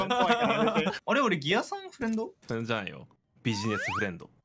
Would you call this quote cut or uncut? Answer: cut